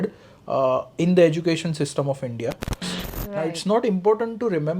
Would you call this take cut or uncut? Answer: cut